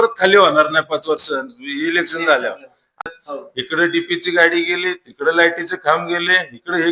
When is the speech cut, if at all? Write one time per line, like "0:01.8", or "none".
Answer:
0:03.0